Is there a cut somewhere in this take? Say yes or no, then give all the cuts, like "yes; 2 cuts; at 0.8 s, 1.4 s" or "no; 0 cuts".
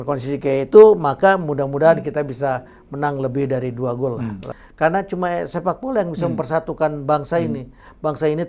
yes; 1 cut; at 4.5 s